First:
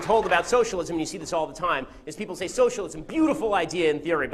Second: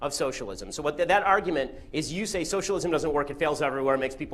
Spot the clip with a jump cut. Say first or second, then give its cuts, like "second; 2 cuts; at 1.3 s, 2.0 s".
second; 1 cut; at 1.3 s